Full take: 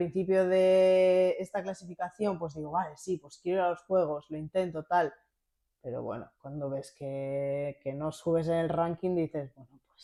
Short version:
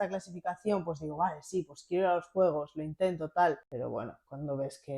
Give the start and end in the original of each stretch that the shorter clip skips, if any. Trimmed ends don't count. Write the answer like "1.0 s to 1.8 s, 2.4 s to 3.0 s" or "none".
5.2 s to 5.8 s